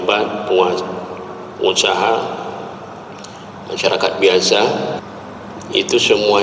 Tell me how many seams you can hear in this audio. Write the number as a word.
one